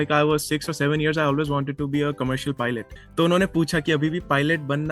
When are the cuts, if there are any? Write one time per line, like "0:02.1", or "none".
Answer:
0:03.0